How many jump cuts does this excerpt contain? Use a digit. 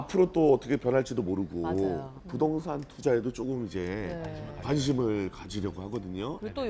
1